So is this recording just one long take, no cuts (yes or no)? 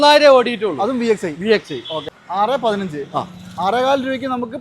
no